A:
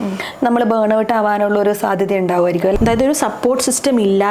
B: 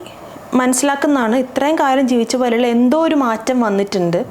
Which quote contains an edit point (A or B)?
A